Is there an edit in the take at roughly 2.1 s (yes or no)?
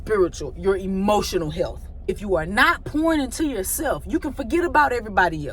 yes